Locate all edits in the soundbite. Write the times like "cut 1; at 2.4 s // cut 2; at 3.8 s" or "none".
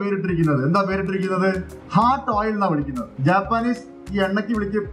cut 1; at 1.7 s // cut 2; at 3.0 s